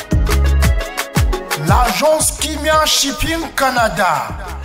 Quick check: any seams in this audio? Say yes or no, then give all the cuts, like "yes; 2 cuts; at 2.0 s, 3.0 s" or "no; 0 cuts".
yes; 1 cut; at 1.6 s